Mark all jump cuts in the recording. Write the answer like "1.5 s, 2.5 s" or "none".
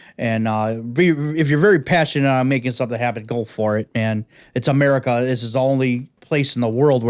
6.1 s